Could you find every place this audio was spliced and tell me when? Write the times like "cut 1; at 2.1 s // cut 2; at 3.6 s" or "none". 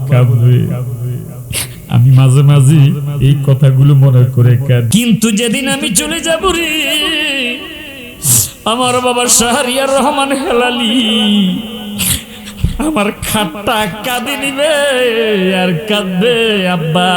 cut 1; at 4.8 s